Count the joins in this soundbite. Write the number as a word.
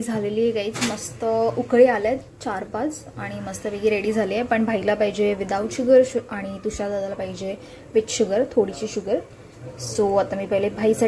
zero